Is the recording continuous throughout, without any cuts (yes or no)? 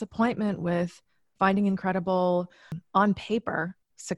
no